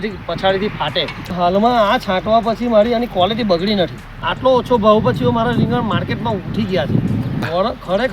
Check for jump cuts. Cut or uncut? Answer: cut